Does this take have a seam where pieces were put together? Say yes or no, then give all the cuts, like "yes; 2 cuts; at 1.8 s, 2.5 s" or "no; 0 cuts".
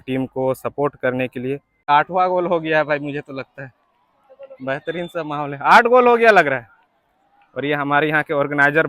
yes; 1 cut; at 1.9 s